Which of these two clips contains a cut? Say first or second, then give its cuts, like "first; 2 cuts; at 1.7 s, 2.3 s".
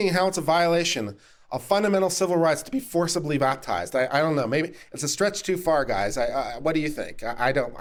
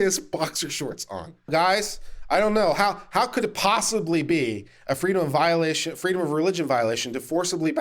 second; 1 cut; at 1.5 s